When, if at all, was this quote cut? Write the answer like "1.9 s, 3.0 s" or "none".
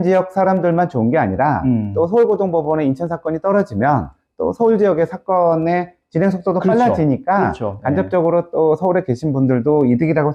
none